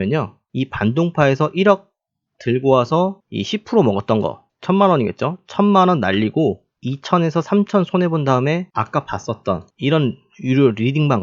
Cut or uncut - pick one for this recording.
cut